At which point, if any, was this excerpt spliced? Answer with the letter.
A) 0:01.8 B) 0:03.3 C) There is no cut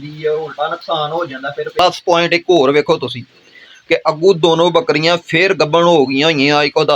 A